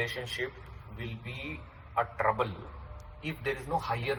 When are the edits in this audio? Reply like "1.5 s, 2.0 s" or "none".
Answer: none